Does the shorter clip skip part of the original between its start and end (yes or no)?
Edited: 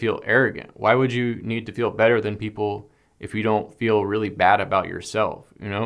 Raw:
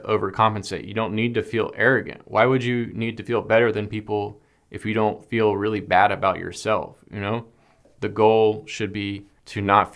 no